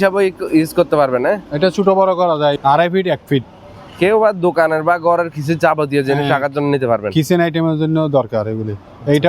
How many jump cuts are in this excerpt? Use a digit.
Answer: 1